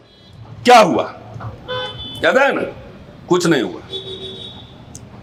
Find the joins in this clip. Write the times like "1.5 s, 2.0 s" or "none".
none